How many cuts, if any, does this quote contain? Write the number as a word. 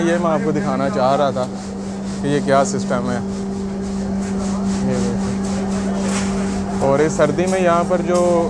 zero